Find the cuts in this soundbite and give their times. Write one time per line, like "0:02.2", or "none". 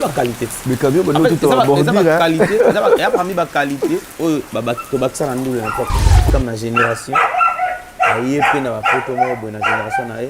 0:06.3